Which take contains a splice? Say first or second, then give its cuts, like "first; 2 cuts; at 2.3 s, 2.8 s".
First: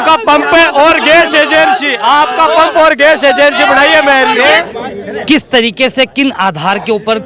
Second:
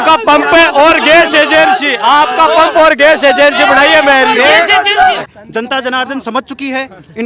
second; 1 cut; at 5.1 s